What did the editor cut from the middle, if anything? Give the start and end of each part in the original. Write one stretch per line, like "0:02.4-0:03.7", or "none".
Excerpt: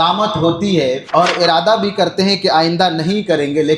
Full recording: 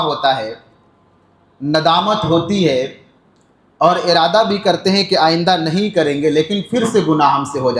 0:02.9-0:03.7